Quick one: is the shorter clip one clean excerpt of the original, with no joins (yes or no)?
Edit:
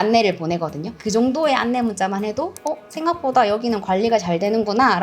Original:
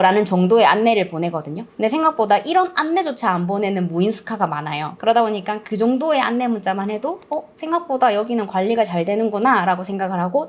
no